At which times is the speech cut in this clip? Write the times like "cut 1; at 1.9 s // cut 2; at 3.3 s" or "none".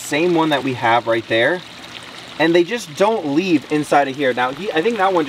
none